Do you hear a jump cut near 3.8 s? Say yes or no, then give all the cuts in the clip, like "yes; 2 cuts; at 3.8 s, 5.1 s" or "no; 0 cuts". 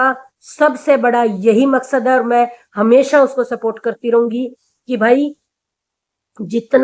no; 0 cuts